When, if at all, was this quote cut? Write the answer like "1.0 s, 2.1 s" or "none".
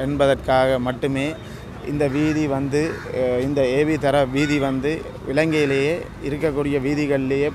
none